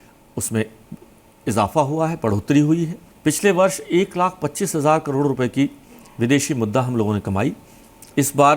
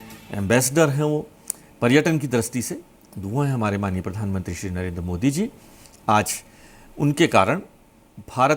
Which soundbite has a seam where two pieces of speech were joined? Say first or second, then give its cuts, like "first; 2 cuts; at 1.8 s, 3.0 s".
first; 1 cut; at 3.0 s